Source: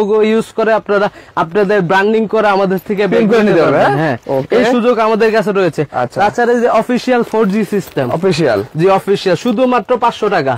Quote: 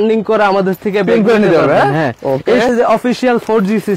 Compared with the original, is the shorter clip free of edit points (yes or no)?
no